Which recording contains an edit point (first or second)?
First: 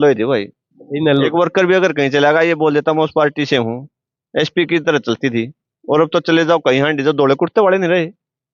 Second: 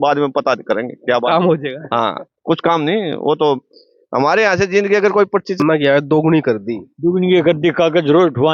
second